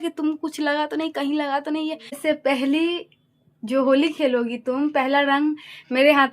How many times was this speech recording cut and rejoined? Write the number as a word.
one